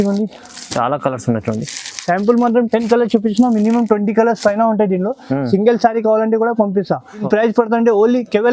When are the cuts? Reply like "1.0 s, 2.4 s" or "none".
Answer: none